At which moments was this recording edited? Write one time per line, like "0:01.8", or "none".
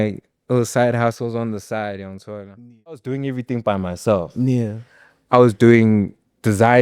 0:03.1